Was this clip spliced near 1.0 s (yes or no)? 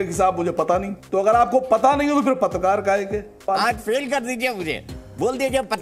yes